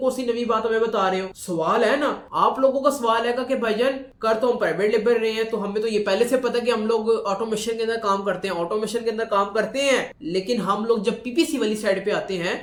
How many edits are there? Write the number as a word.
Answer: zero